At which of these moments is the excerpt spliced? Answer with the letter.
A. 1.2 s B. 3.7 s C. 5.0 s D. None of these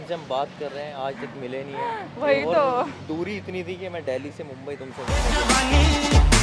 C